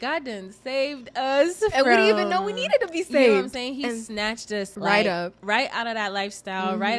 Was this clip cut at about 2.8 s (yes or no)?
no